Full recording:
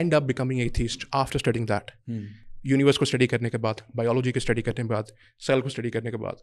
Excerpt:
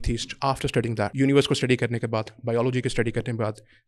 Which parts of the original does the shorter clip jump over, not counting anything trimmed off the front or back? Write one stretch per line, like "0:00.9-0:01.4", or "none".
0:01.8-0:02.6